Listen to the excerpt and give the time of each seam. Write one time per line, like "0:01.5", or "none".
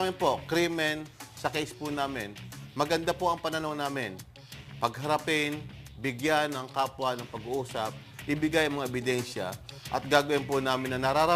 0:03.5